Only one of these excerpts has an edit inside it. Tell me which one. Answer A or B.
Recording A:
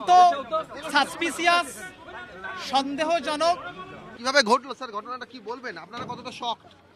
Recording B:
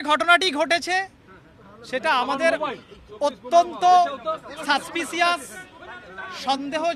A